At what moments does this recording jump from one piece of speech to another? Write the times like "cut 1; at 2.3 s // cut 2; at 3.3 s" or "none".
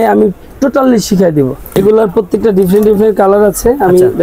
cut 1; at 1.6 s